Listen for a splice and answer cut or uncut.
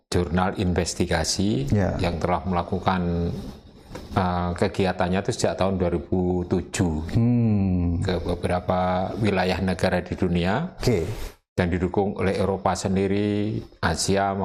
uncut